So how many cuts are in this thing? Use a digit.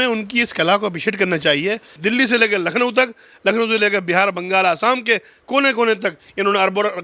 1